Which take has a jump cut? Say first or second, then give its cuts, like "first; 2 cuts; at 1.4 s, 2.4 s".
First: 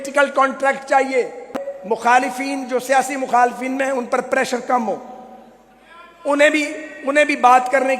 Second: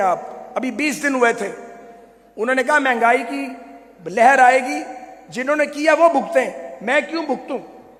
first; 1 cut; at 1.6 s